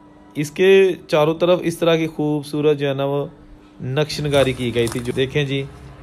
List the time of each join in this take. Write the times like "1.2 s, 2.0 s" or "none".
5.1 s